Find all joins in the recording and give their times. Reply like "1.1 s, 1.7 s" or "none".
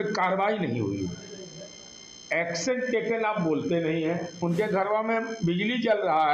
4.3 s